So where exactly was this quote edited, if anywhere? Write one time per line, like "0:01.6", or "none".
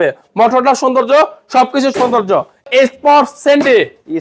0:02.6